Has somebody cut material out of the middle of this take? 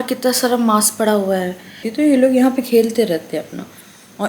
yes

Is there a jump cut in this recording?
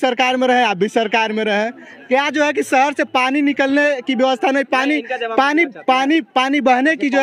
no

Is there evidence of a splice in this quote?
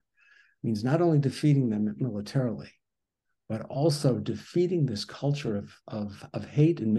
no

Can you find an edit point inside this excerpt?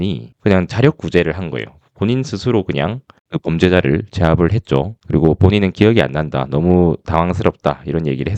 yes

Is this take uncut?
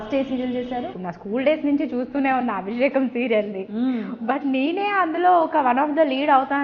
no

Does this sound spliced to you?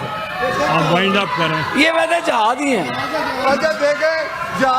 no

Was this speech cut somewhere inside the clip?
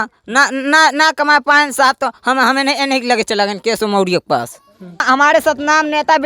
yes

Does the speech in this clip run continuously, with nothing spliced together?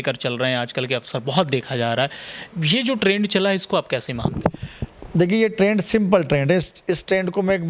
yes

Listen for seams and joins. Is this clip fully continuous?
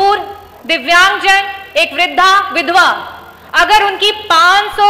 yes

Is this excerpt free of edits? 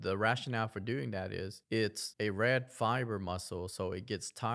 no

